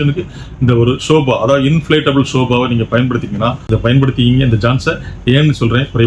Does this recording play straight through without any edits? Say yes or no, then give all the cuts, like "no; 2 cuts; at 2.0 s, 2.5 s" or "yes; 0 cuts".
no; 1 cut; at 3.7 s